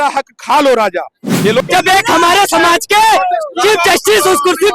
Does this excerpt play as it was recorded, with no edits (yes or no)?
no